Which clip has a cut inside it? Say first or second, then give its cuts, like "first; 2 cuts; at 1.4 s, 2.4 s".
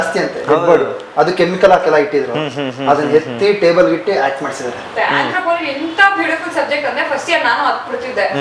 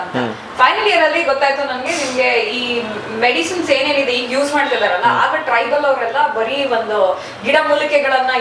first; 1 cut; at 4.8 s